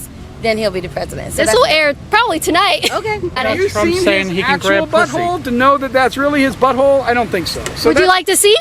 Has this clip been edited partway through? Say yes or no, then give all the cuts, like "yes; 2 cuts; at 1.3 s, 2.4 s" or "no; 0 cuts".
yes; 1 cut; at 3.4 s